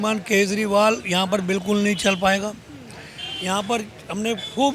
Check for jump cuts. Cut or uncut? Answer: uncut